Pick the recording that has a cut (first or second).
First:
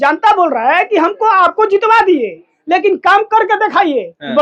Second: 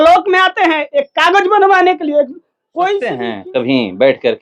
second